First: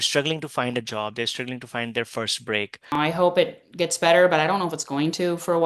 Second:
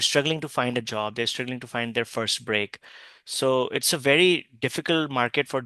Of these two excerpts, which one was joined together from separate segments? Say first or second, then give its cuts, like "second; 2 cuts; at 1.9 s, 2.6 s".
first; 1 cut; at 2.9 s